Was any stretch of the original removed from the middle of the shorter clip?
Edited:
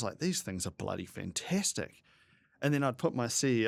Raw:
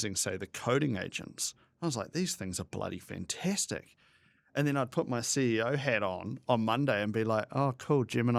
no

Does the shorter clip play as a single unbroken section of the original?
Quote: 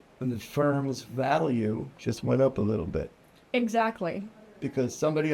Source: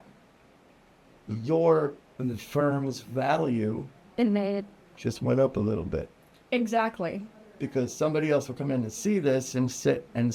no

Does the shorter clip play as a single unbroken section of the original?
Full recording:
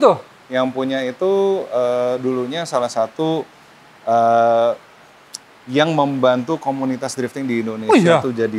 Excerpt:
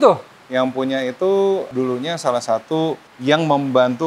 no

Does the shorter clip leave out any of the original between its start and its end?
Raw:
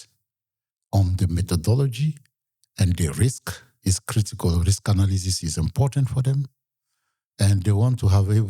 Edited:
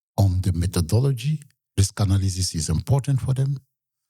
yes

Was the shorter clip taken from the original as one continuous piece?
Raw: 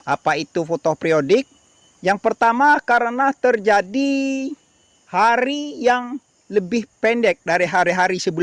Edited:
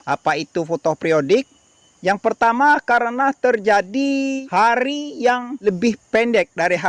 no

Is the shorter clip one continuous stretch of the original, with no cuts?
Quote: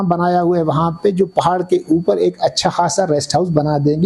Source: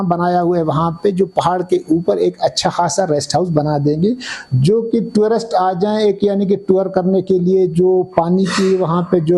yes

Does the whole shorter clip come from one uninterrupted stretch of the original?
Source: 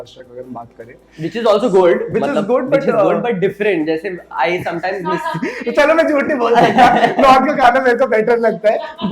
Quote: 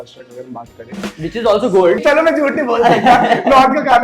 no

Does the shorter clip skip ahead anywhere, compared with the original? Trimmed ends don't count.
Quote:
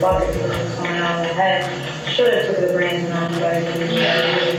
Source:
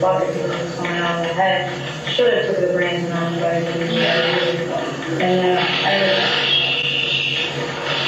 no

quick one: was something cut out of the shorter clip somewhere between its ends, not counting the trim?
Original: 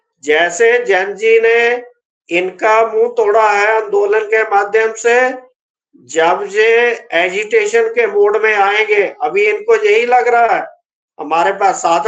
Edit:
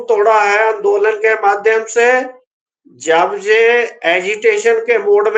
no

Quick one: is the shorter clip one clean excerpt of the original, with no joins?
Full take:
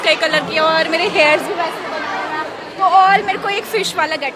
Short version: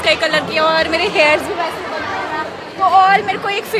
yes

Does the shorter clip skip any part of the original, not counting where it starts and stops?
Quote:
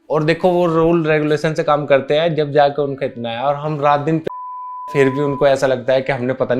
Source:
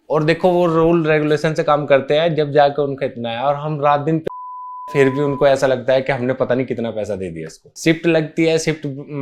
no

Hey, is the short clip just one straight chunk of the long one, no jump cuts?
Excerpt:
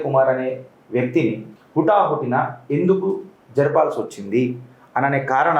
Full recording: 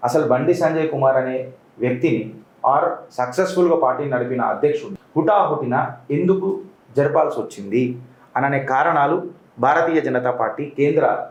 no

